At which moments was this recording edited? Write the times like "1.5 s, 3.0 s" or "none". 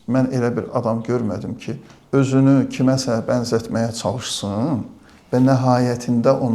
none